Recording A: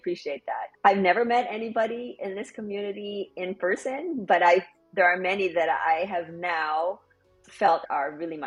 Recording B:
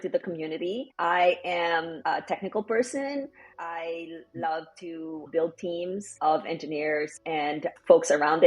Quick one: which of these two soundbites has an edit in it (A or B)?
B